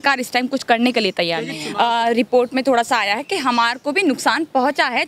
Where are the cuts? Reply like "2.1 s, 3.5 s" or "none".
1.6 s